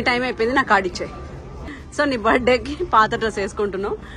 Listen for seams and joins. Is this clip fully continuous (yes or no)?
yes